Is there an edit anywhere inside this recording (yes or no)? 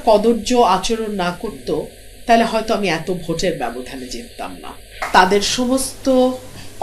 yes